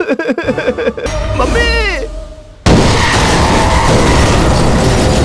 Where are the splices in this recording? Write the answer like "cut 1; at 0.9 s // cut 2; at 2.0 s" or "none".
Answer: cut 1; at 1.0 s // cut 2; at 2.7 s